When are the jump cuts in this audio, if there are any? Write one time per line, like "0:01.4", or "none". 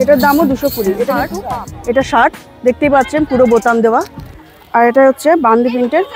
0:01.3